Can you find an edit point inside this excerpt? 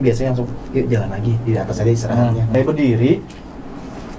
yes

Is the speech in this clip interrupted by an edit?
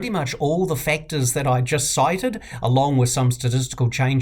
no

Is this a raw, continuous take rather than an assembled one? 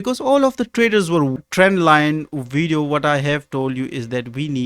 no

